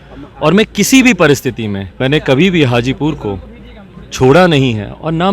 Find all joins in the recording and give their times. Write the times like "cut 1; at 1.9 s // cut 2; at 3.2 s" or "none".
cut 1; at 1.9 s